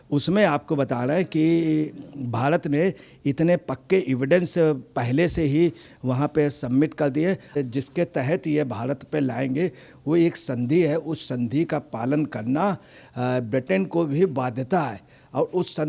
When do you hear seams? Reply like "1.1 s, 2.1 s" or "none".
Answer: 7.6 s